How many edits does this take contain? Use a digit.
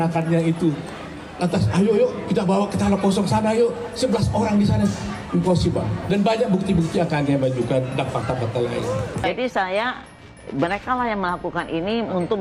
0